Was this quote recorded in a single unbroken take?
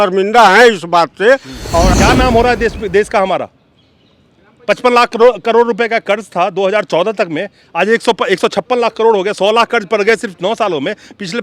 no; 1 cut; at 1.9 s

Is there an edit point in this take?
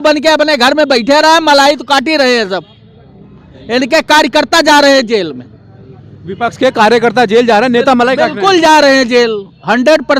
no; 0 cuts

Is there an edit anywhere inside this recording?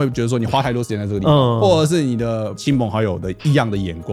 no; 0 cuts

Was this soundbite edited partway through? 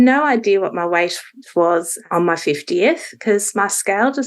yes; 1 cut; at 1.4 s

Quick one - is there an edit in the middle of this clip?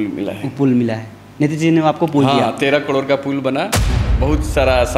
yes; 1 cut; at 4.1 s

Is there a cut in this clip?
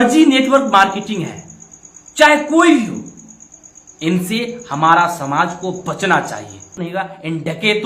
yes; 1 cut; at 6.8 s

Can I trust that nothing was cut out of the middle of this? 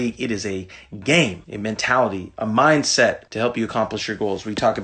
no; 2 cuts; at 1.5 s, 3.3 s

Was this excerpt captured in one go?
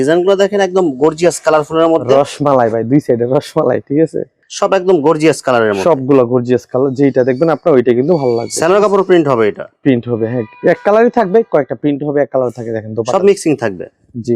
yes; 0 cuts

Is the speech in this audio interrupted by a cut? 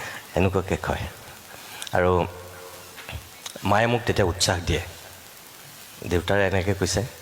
no; 0 cuts

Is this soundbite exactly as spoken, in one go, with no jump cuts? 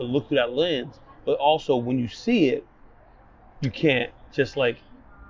yes; 0 cuts

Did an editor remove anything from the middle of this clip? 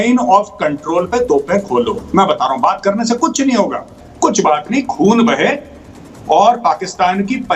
yes; 1 cut; at 4.0 s

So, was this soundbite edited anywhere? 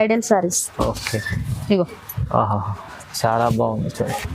yes; 1 cut; at 3.0 s

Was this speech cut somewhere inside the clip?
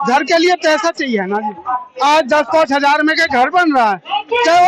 no; 0 cuts

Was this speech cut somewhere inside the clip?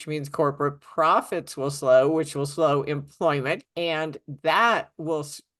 yes; 1 cut; at 3.6 s

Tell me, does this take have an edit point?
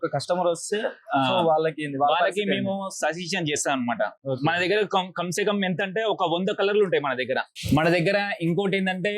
yes; 2 cuts; at 4.2 s, 7.5 s

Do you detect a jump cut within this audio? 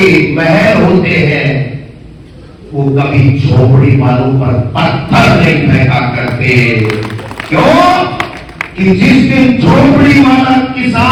no; 0 cuts

